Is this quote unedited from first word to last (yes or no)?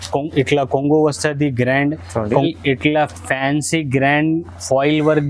no